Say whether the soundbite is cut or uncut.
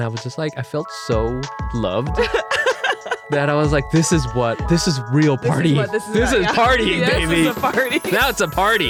uncut